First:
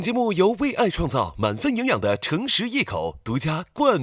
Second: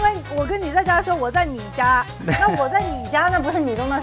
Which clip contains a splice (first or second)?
second